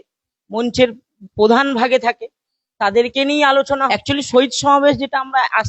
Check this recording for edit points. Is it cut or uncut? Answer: cut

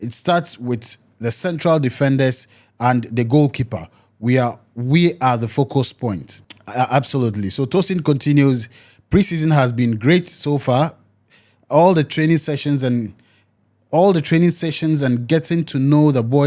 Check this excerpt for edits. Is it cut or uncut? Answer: uncut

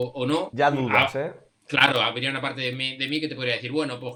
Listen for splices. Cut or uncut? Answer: uncut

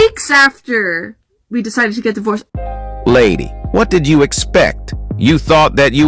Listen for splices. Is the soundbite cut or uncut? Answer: uncut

